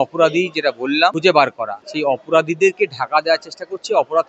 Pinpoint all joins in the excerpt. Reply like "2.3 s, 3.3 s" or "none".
1.2 s, 1.8 s

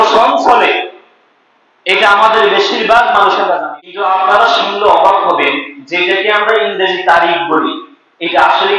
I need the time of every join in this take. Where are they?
3.6 s

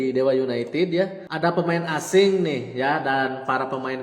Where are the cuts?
1.2 s

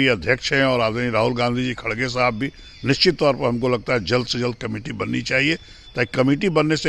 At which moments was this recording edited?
none

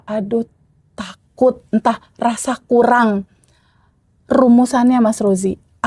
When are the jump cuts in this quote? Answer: none

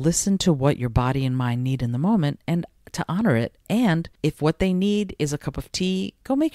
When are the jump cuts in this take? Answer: 4.1 s

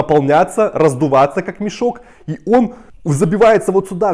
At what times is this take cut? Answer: none

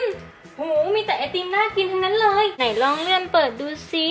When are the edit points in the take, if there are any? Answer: 2.6 s

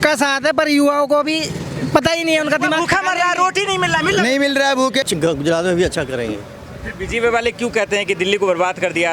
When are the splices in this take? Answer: 5.1 s

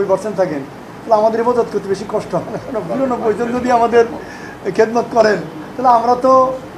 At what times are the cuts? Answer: none

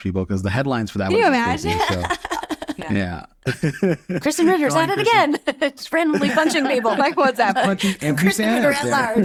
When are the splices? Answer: none

